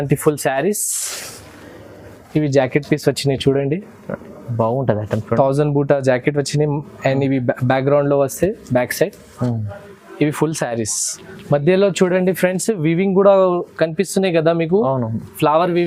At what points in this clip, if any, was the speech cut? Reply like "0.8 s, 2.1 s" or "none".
none